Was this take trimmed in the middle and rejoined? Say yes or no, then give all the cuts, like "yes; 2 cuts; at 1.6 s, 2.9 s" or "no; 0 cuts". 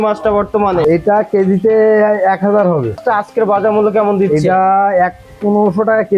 yes; 2 cuts; at 0.8 s, 3.0 s